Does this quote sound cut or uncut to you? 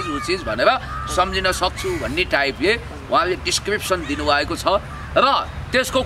uncut